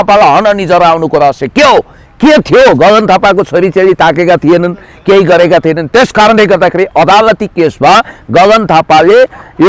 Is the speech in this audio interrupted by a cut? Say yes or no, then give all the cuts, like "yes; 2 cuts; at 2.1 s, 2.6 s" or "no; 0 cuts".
no; 0 cuts